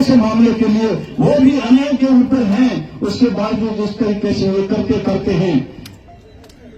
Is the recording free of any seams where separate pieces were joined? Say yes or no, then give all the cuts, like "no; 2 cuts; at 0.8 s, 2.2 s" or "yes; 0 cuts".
yes; 0 cuts